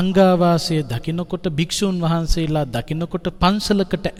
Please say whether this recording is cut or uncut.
uncut